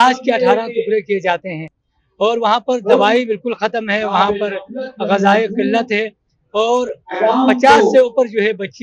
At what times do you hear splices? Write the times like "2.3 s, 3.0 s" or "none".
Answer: none